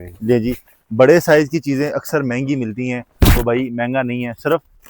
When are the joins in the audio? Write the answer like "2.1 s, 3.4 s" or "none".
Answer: none